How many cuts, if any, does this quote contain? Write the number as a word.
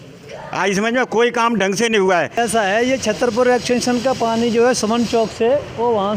one